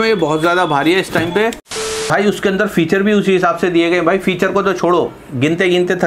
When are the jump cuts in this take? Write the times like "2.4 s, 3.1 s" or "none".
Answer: 2.1 s